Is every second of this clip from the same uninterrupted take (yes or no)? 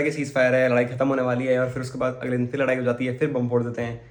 yes